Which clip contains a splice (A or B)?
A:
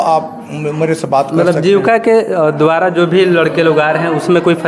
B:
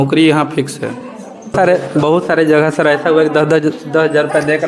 B